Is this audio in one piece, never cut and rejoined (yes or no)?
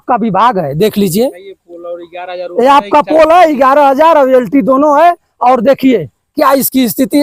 yes